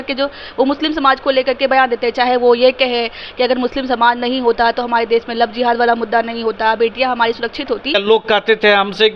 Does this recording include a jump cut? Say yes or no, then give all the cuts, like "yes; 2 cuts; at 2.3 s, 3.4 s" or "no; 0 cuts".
yes; 1 cut; at 7.9 s